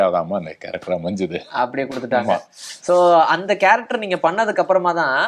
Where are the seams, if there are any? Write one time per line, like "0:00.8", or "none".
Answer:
none